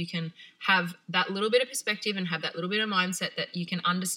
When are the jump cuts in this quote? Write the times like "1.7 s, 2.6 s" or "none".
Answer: none